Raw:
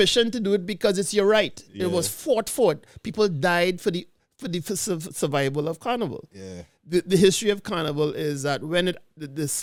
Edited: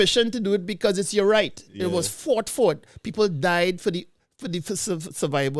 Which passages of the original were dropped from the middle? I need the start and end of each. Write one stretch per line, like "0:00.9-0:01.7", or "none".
none